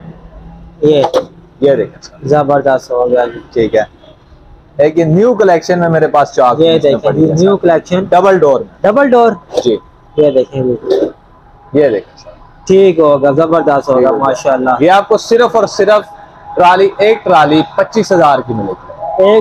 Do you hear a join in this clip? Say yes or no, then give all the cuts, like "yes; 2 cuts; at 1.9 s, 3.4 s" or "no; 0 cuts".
no; 0 cuts